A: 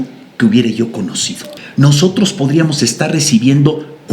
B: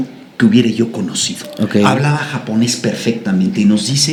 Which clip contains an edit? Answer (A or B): A